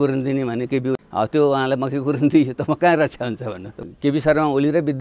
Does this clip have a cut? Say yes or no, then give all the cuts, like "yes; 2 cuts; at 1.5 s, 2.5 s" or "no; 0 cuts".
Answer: yes; 1 cut; at 3.8 s